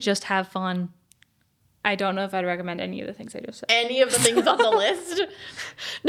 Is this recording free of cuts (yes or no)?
yes